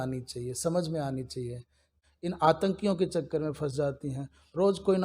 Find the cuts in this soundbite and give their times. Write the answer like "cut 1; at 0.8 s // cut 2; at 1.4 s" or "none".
cut 1; at 1.9 s